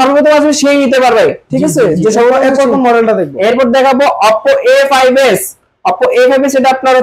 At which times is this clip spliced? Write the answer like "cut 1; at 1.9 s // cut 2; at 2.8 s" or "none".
none